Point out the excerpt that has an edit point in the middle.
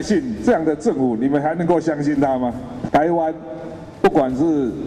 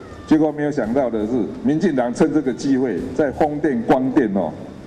first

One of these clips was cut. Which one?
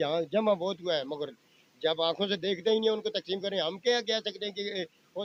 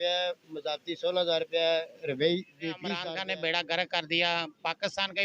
second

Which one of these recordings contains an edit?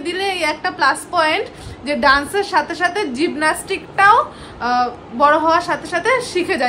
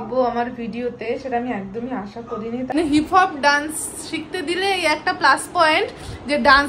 second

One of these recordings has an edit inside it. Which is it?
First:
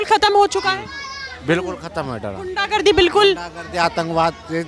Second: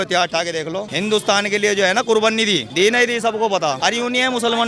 second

